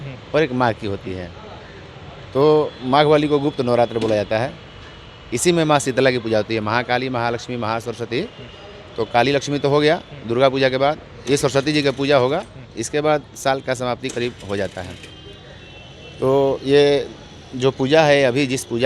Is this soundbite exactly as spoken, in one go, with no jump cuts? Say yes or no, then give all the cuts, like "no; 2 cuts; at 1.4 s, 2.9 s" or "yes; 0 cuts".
yes; 0 cuts